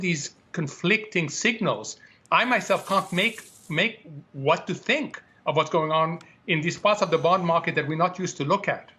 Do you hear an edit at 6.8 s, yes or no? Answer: no